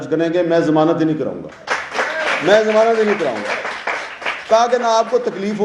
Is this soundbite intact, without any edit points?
yes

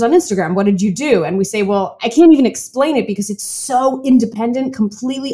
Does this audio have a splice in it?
yes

